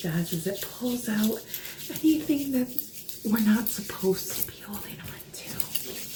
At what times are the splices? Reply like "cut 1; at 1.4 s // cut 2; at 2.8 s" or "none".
none